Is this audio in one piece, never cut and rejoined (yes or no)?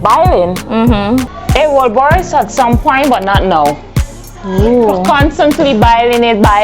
no